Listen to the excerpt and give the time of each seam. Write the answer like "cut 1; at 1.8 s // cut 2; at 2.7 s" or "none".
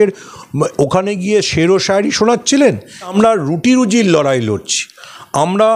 cut 1; at 3.1 s